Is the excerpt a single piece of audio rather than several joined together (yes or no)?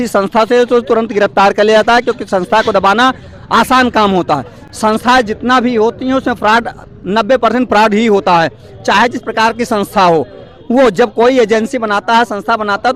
yes